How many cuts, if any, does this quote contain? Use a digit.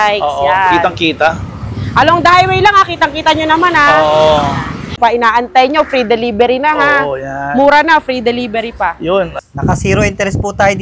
2